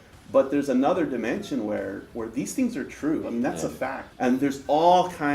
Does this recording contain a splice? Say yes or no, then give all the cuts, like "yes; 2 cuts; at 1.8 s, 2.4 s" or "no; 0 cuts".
yes; 1 cut; at 4.0 s